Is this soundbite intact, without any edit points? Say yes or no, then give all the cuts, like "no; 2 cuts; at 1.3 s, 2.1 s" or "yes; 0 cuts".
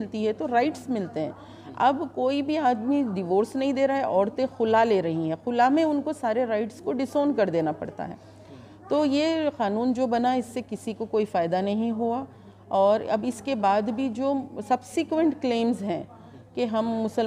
yes; 0 cuts